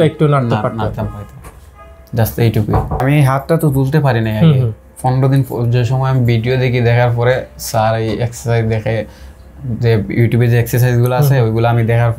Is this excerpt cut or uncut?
cut